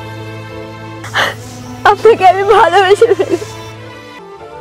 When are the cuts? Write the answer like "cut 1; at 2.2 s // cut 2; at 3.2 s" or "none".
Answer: cut 1; at 1.0 s